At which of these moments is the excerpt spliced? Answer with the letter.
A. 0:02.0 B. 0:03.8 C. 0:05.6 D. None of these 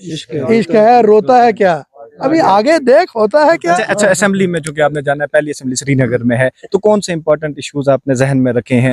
D